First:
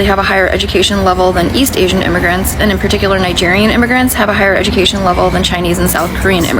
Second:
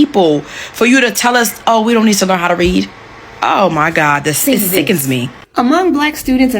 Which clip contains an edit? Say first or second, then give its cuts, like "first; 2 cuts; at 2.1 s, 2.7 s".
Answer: second; 1 cut; at 5.4 s